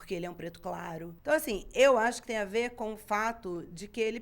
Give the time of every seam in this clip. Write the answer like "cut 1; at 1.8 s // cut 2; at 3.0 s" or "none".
cut 1; at 1.1 s